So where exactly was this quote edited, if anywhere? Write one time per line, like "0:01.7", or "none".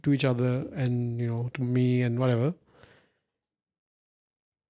none